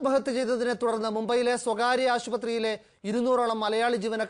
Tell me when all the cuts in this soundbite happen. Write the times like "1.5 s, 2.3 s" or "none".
none

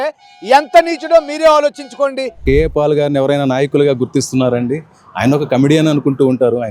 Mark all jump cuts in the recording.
2.4 s

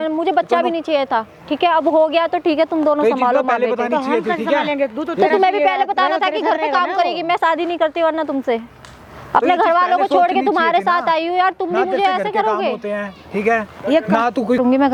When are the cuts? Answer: none

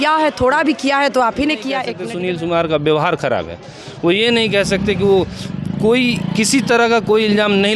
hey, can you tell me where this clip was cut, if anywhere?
2.0 s

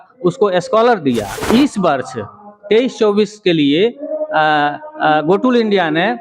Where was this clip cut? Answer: 1.3 s

